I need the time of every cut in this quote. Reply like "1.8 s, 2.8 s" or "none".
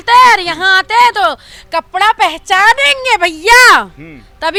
none